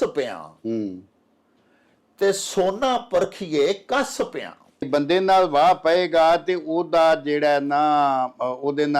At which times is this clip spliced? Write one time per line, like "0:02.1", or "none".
0:04.9